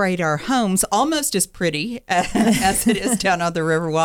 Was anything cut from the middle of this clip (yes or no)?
no